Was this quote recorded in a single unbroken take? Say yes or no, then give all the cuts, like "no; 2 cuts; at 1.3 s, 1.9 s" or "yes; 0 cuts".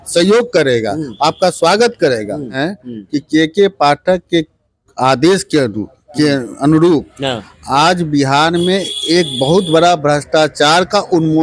no; 1 cut; at 2.7 s